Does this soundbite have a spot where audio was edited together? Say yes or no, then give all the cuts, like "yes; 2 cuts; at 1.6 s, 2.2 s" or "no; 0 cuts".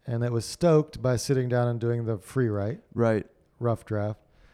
no; 0 cuts